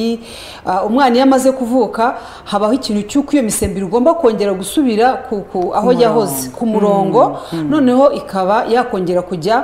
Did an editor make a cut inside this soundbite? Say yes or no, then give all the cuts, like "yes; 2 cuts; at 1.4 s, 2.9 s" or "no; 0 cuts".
no; 0 cuts